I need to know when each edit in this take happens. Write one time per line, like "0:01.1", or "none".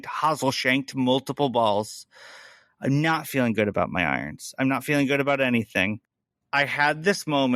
0:06.1